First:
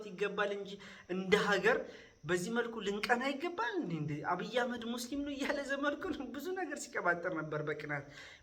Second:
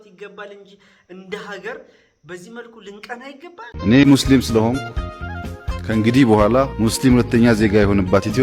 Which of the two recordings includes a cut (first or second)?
second